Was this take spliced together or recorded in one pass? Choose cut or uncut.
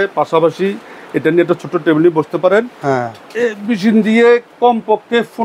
uncut